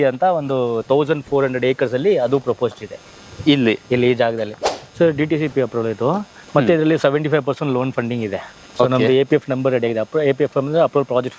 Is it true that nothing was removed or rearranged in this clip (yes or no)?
no